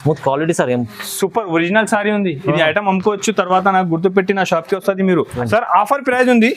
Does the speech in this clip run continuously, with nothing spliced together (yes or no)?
no